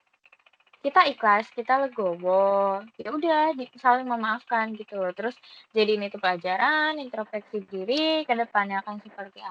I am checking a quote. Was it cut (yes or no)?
no